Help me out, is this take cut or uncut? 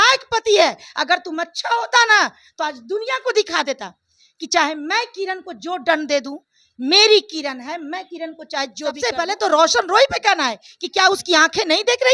cut